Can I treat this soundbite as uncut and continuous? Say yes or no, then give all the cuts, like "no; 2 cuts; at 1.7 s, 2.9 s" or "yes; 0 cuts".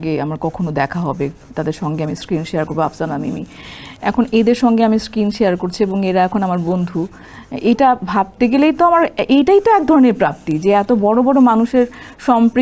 yes; 0 cuts